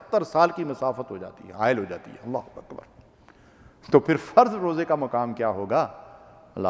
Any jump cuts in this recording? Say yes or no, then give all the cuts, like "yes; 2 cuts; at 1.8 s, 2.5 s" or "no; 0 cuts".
no; 0 cuts